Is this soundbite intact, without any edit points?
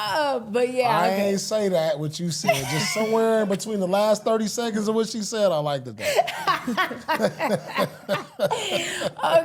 yes; 0 cuts

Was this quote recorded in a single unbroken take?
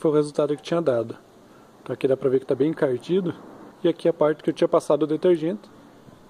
no; 1 cut; at 3.6 s

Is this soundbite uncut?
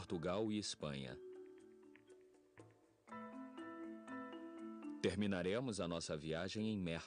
no; 1 cut; at 3.5 s

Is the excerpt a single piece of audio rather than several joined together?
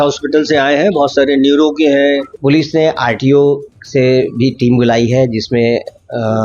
no; 1 cut; at 2.3 s

